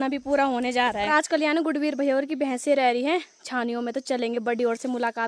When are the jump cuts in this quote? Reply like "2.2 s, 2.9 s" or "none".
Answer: 1.1 s